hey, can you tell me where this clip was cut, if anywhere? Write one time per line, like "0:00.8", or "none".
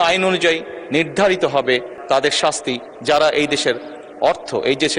0:02.0

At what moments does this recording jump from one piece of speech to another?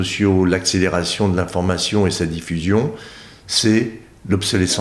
none

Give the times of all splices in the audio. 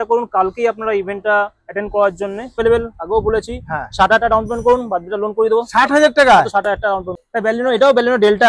0:02.6
0:07.1

